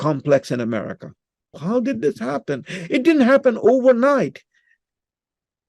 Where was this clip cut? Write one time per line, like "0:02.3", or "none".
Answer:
0:01.5